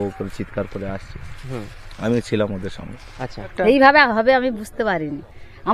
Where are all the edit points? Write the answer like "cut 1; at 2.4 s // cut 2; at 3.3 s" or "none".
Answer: cut 1; at 3.5 s